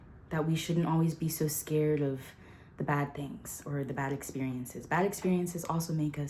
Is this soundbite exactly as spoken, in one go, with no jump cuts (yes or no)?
yes